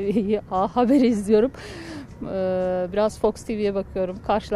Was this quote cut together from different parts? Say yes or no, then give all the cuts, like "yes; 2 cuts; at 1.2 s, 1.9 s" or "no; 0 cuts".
no; 0 cuts